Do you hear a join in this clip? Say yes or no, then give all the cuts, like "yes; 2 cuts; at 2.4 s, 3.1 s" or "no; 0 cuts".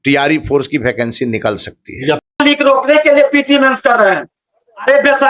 yes; 1 cut; at 2.2 s